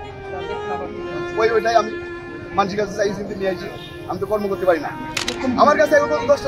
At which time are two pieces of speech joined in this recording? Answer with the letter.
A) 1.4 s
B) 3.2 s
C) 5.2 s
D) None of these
C